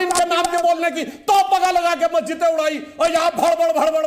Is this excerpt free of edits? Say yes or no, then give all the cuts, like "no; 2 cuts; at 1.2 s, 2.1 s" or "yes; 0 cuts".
yes; 0 cuts